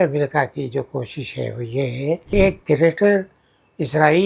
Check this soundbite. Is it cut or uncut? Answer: cut